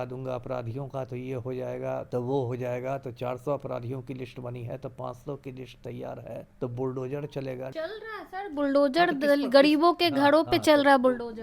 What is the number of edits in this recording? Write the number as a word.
three